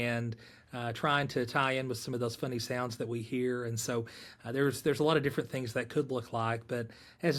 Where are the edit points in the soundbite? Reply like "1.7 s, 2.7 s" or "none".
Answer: none